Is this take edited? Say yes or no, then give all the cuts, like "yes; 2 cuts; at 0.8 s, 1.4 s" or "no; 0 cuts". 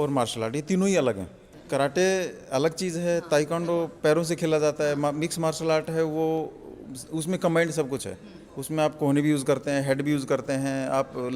no; 0 cuts